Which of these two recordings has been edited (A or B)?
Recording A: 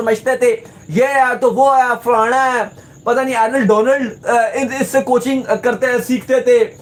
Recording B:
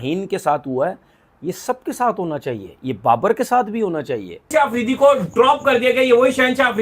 B